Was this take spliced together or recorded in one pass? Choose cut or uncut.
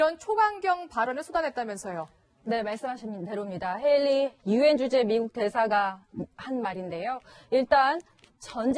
cut